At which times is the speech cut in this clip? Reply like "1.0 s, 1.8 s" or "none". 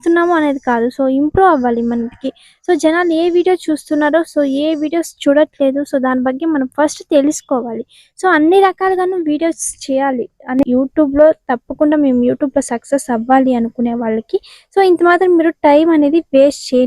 10.6 s